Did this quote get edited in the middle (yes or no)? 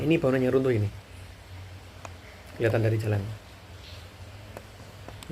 no